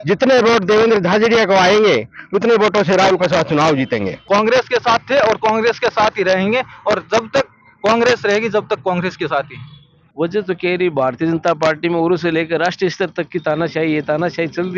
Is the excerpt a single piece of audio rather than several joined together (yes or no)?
no